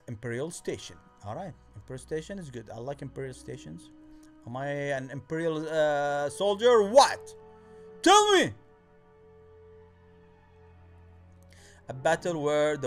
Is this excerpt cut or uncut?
uncut